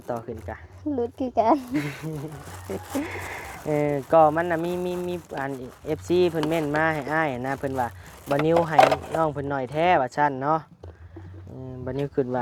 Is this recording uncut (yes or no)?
yes